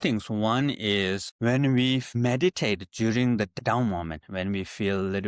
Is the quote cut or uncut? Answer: cut